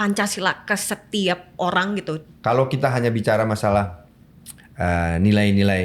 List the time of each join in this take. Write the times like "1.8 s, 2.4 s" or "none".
2.2 s